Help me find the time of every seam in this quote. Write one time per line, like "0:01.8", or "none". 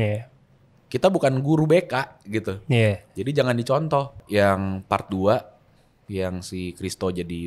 0:04.2